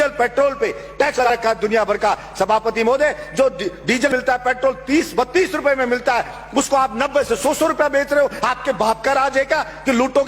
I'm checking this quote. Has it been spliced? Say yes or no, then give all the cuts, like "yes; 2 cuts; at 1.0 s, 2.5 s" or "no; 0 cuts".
yes; 2 cuts; at 1.3 s, 4.1 s